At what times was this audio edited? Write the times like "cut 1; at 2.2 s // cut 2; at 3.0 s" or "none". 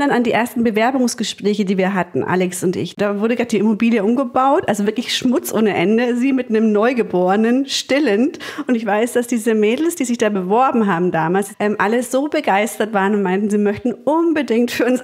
cut 1; at 2.9 s // cut 2; at 8.7 s // cut 3; at 11.5 s